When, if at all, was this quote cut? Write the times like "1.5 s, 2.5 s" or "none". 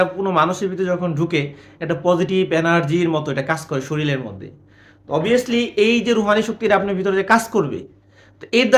none